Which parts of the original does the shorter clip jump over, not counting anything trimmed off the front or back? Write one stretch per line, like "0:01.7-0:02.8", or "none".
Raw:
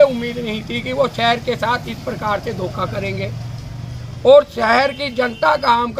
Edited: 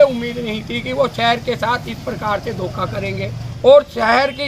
0:03.4-0:04.0